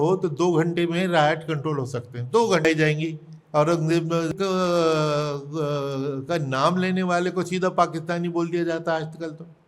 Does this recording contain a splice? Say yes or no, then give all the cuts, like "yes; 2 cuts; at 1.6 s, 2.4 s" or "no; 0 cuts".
yes; 2 cuts; at 2.6 s, 4.3 s